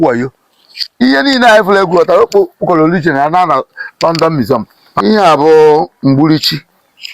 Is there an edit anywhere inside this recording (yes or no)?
yes